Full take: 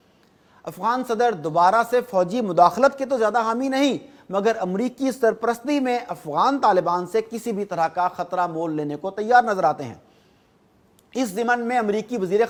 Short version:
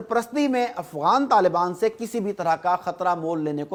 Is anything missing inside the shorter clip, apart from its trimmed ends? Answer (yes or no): no